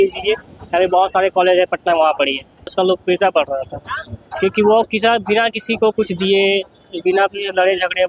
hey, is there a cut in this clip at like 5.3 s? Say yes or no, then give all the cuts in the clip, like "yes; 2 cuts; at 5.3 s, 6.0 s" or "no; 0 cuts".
no; 1 cut; at 2.7 s